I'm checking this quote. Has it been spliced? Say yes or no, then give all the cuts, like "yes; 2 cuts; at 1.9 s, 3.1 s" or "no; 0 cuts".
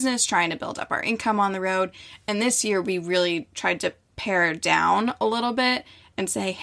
no; 0 cuts